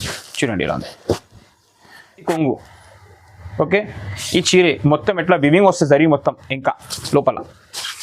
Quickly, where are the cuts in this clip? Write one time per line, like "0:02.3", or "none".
0:02.2